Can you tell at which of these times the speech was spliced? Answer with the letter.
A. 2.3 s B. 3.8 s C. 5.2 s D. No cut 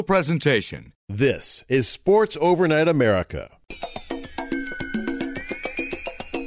B